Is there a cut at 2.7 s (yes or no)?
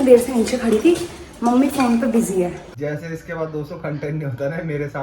yes